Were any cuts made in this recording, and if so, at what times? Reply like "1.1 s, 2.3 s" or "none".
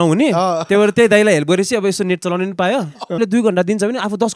3.2 s